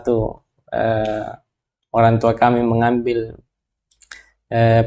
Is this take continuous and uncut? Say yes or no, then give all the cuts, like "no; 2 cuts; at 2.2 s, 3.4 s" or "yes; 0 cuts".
yes; 0 cuts